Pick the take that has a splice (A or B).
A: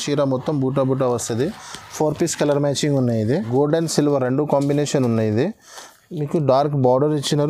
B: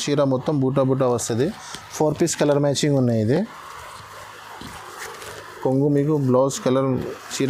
A